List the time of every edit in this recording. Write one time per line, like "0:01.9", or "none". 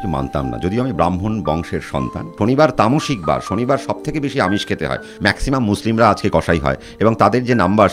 0:02.2
0:05.1